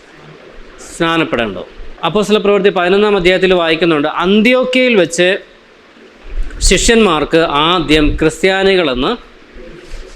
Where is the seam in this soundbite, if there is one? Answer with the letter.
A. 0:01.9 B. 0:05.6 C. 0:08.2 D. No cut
A